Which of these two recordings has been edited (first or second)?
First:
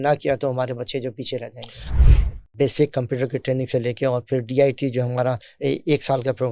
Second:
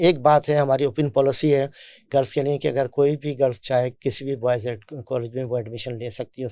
first